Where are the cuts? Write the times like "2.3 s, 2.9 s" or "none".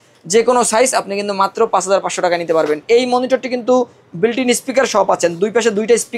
2.8 s